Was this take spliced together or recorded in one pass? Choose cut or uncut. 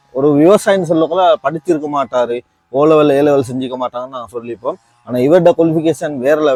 uncut